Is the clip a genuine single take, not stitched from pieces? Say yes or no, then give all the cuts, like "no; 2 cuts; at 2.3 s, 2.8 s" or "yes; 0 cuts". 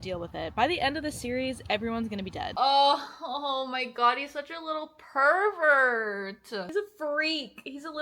no; 2 cuts; at 2.5 s, 6.7 s